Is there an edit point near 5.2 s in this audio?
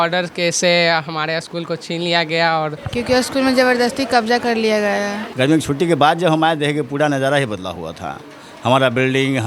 yes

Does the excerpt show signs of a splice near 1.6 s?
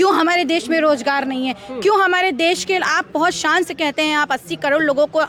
no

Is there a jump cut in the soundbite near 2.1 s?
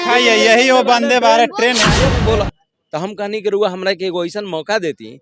yes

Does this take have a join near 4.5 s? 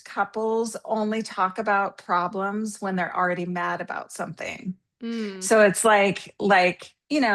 no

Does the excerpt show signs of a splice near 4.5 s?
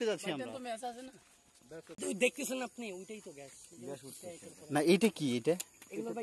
no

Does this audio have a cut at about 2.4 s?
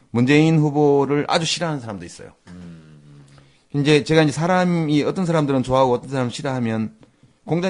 no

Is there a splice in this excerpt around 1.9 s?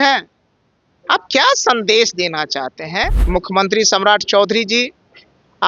no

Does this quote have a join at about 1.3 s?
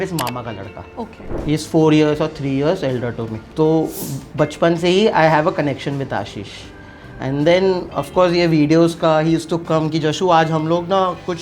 yes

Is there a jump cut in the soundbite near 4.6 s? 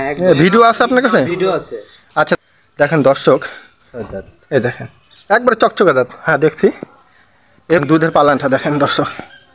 no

